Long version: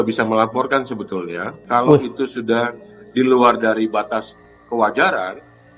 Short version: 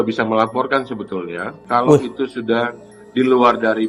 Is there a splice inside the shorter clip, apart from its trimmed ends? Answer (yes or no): no